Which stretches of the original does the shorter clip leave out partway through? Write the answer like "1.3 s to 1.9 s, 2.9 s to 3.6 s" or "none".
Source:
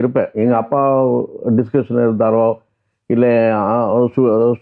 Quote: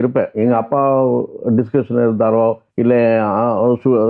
2.7 s to 3.0 s

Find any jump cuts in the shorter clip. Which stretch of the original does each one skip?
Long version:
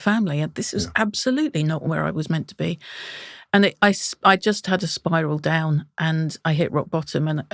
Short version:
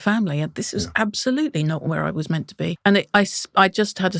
2.8 s to 3.4 s

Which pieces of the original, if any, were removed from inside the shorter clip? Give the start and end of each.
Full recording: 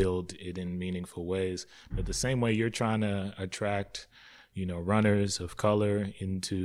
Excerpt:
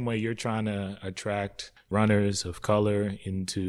4.2 s to 4.8 s

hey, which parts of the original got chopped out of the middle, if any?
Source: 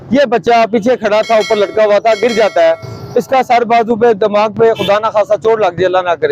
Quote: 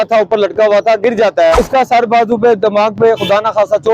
2.7 s to 3.1 s

